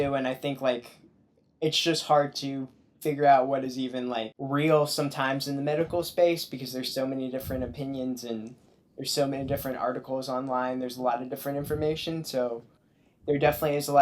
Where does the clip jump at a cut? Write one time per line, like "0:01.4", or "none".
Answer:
none